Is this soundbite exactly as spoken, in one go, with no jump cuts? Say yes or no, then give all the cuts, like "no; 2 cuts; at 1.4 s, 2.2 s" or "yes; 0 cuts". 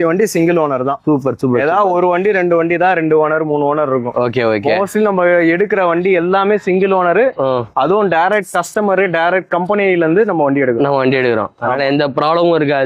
yes; 0 cuts